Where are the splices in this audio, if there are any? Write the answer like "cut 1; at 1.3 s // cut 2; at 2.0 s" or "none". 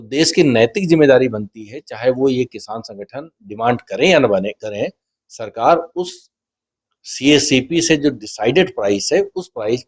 none